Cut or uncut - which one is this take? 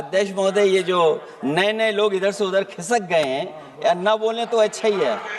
uncut